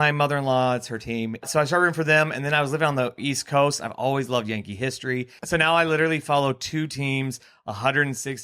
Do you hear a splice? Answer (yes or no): yes